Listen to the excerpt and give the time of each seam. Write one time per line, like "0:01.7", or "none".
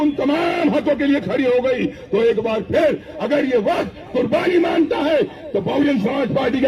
none